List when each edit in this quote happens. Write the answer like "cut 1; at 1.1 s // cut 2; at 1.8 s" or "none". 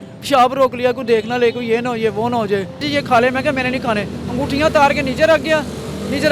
cut 1; at 2.9 s